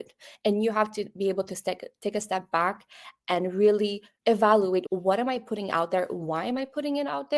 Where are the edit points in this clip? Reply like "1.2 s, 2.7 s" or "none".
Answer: 4.1 s, 4.9 s

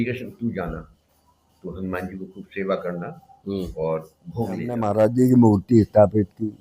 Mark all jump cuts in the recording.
4.8 s

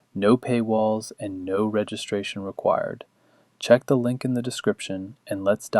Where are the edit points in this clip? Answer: 3.8 s

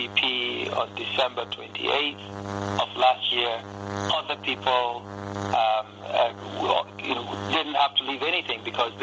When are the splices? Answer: 2.7 s

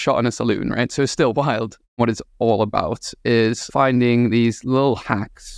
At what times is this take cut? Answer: 2.0 s, 3.6 s

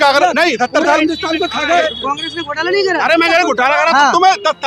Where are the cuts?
1.8 s

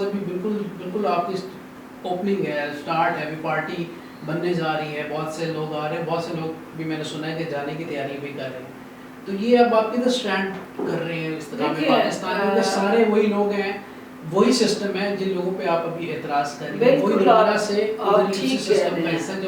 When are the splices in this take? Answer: none

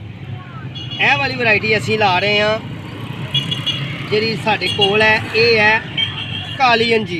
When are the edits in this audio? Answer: none

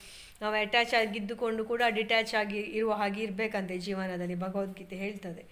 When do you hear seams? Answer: none

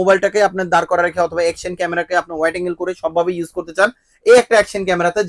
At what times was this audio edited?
none

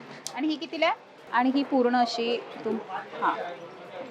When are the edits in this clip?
1.2 s

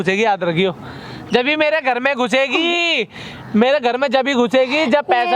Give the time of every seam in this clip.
none

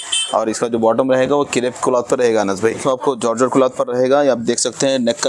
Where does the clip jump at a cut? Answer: 2.8 s

